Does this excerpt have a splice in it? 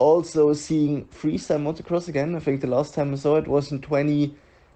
no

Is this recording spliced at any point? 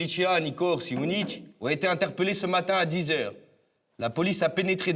yes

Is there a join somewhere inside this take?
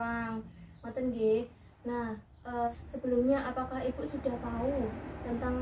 yes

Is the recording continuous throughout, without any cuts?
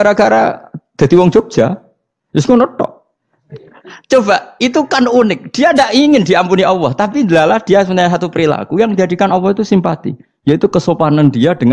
no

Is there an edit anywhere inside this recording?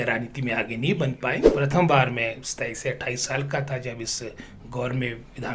yes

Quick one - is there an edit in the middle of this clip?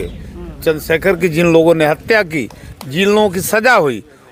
no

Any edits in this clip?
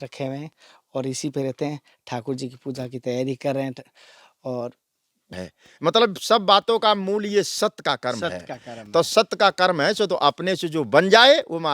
yes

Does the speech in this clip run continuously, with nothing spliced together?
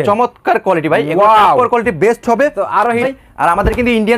no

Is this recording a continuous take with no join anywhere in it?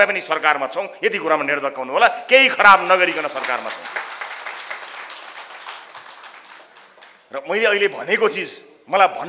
yes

